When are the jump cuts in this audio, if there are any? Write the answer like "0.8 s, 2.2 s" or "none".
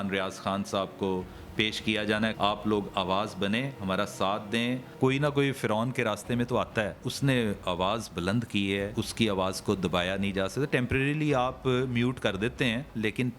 2.3 s, 4.9 s, 7.1 s, 8.9 s